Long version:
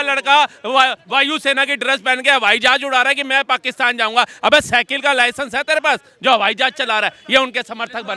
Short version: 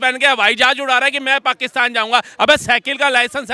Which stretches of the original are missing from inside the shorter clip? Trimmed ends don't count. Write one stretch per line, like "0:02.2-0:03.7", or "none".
none